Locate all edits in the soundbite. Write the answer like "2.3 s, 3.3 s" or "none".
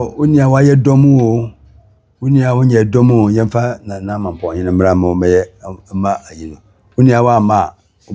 none

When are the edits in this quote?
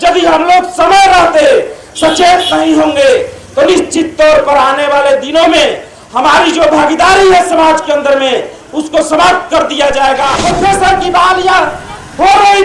10.3 s

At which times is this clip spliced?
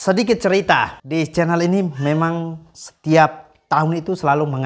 1.0 s

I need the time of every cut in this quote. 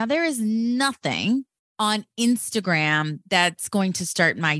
1.6 s

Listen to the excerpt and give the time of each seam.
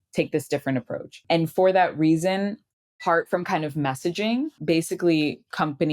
1.2 s, 3.0 s, 4.6 s

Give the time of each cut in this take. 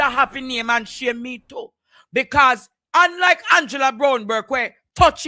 none

